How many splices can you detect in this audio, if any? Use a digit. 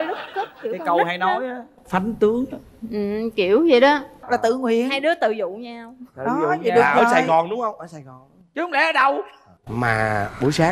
1